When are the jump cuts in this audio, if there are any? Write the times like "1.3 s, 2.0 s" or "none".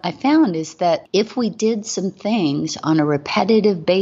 1.0 s